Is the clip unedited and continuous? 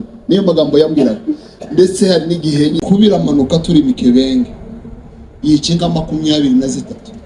no; 1 cut; at 2.8 s

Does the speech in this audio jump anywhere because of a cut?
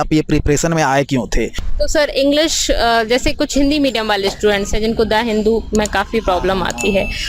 yes; 1 cut; at 1.6 s

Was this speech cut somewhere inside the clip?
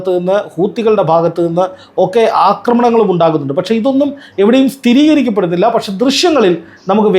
no; 0 cuts

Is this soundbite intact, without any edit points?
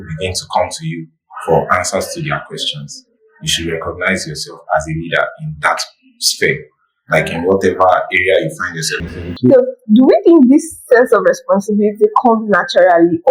no; 1 cut; at 9.1 s

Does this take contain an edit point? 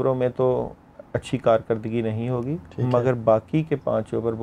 no; 0 cuts

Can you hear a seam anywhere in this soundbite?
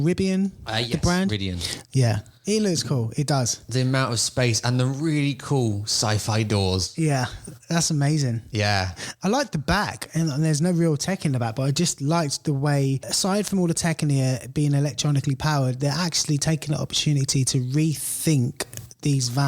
yes; 1 cut; at 13.1 s

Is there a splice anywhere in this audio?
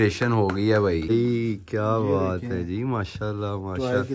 yes; 1 cut; at 1.1 s

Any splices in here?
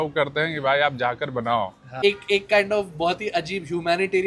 yes; 1 cut; at 1.9 s

